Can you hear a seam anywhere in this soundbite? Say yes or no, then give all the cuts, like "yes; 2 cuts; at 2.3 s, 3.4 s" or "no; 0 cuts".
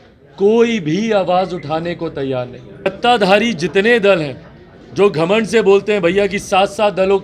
yes; 1 cut; at 2.9 s